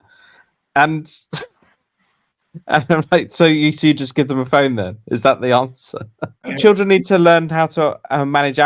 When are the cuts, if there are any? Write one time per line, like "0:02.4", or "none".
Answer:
0:06.5